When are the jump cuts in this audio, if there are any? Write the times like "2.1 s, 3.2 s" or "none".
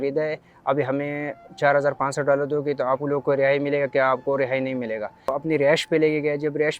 5.3 s